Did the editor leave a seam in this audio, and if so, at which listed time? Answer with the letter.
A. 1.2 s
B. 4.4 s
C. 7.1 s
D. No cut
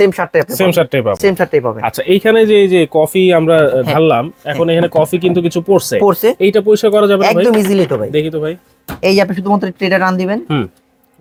D